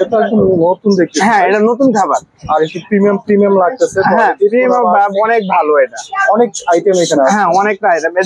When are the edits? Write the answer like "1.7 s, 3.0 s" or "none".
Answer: none